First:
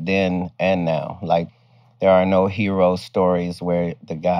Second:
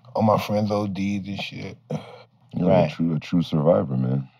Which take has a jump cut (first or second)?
first